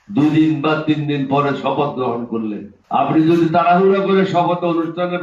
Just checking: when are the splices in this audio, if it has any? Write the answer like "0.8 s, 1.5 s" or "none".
2.7 s